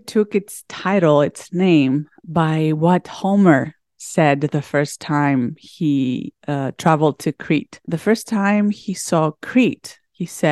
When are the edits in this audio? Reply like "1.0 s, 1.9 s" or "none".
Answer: 2.2 s, 7.9 s

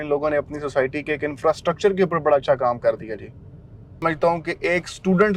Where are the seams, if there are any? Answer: 3.7 s

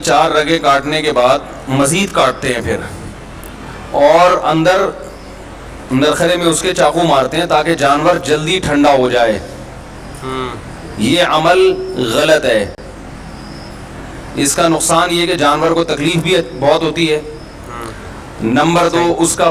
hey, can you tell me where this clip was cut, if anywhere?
none

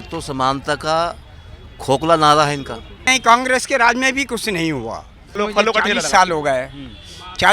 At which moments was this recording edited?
3.0 s, 5.4 s

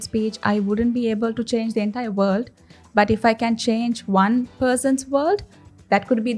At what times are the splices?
none

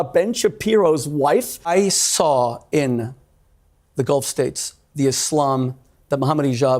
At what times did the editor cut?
1.7 s

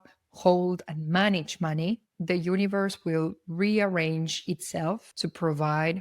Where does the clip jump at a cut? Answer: 5.1 s

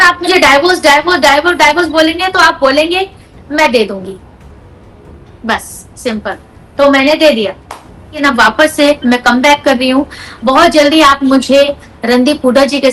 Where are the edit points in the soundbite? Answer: 8.2 s

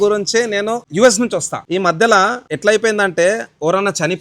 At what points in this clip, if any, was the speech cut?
0.8 s, 1.6 s, 2.5 s

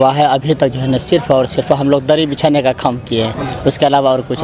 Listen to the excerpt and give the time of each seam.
none

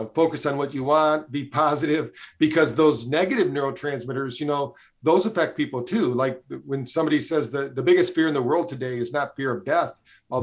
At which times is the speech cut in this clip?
none

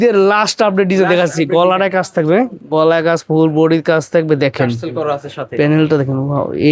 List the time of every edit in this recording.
none

